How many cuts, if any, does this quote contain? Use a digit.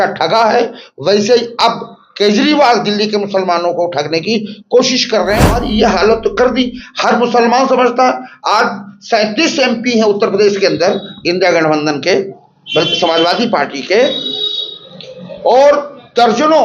1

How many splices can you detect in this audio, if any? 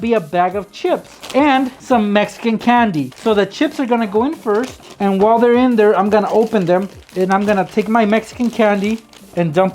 4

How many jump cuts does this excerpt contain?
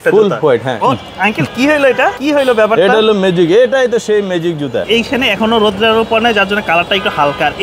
3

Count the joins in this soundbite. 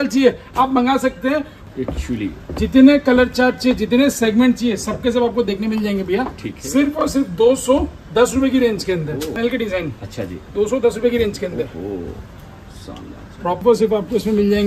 3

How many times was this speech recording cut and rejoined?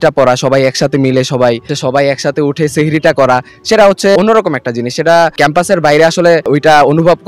4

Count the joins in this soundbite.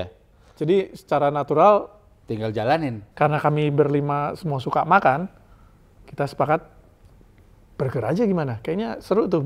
1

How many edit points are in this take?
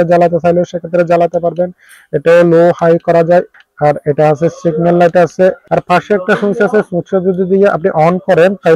2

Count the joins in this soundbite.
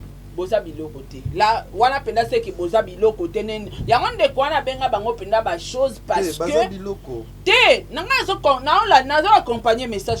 0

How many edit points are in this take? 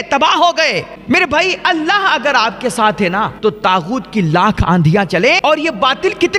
3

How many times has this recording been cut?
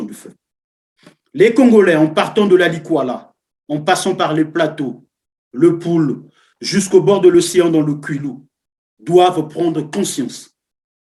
0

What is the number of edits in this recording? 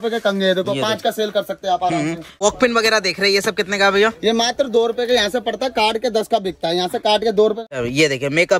2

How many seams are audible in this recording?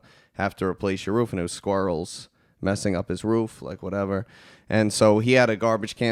0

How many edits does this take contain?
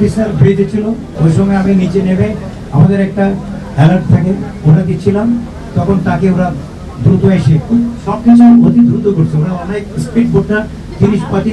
1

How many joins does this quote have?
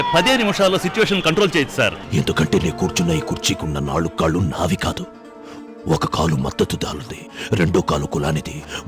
1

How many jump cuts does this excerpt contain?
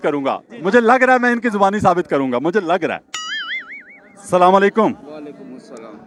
0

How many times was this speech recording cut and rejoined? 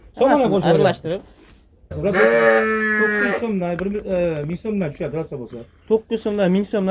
1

